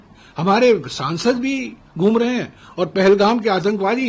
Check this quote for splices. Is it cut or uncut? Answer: uncut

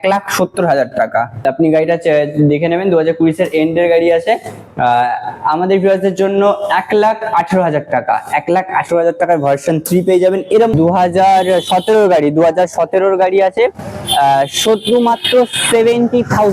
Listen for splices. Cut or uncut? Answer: cut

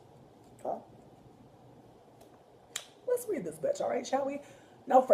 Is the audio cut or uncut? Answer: uncut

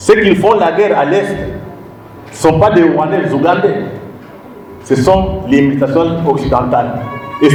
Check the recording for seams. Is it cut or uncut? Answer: uncut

